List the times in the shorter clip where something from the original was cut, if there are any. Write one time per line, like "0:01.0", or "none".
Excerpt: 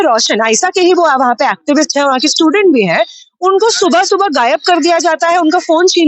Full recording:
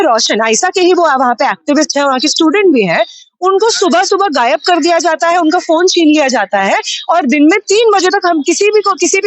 none